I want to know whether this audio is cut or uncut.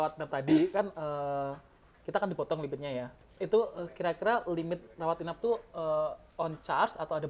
uncut